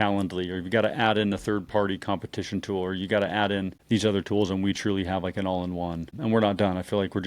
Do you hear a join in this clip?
yes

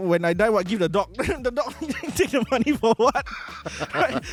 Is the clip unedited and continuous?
yes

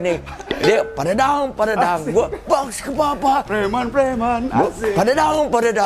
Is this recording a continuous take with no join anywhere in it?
yes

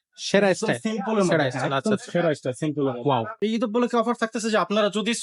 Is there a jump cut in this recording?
yes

